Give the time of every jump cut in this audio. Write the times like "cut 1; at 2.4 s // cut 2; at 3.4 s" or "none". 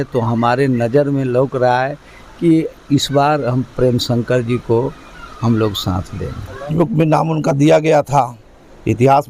cut 1; at 6.7 s

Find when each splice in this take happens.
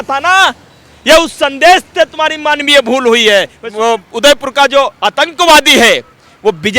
cut 1; at 3.6 s

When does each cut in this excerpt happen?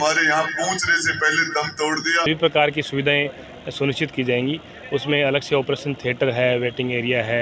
cut 1; at 2.3 s

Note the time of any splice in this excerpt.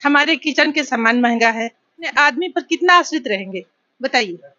cut 1; at 2.1 s

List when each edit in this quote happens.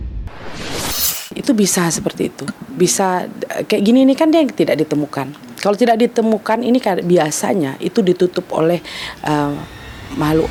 none

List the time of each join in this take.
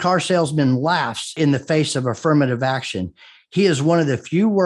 cut 1; at 1.3 s

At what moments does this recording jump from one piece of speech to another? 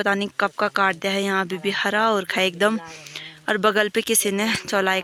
none

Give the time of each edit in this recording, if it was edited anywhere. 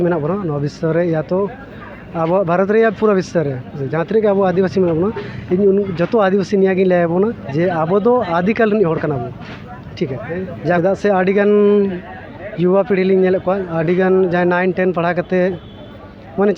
cut 1; at 10.8 s

